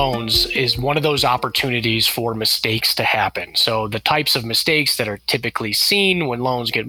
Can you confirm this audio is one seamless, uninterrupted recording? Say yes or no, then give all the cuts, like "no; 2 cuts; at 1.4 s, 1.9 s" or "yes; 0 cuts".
yes; 0 cuts